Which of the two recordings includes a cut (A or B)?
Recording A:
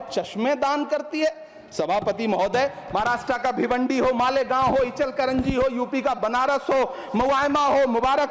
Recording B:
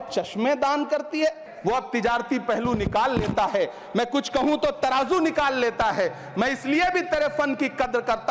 B